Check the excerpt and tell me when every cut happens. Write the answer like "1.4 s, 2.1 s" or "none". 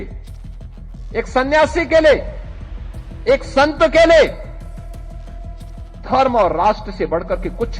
4.5 s, 6.0 s